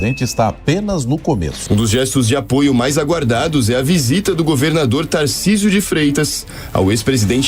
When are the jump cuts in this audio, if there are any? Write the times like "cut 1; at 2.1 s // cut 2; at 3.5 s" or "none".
cut 1; at 1.5 s